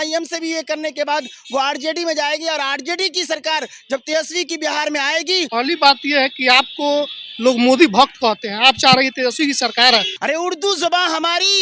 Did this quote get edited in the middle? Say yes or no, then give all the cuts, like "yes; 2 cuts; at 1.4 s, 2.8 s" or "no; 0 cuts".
yes; 2 cuts; at 5.5 s, 10.1 s